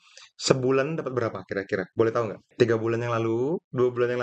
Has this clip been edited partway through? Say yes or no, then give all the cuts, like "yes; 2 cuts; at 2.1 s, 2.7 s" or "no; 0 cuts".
no; 0 cuts